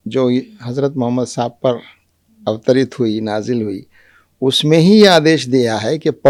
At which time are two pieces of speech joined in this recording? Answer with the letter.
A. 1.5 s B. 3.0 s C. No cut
C